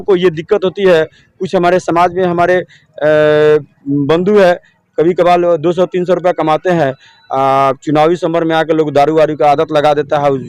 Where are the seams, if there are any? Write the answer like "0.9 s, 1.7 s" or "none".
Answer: none